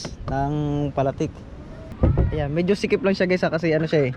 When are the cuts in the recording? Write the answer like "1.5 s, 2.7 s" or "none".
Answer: 1.9 s